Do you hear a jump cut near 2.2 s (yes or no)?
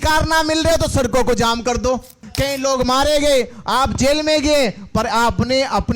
yes